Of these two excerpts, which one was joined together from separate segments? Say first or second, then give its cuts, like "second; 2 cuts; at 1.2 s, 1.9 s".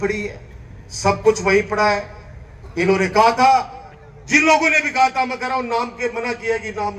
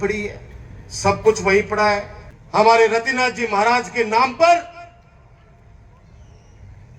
second; 1 cut; at 2.6 s